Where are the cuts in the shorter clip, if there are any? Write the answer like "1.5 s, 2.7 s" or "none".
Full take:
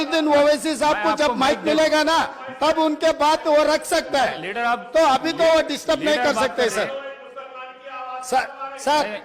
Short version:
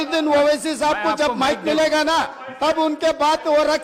none